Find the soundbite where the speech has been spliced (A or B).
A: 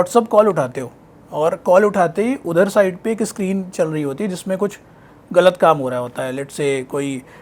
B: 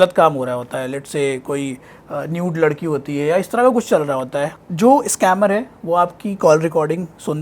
B